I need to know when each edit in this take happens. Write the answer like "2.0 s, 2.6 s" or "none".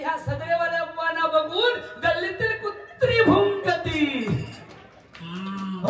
none